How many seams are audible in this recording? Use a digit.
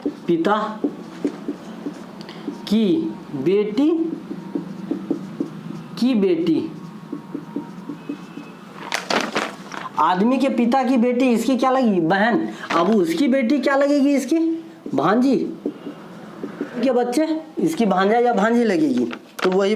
1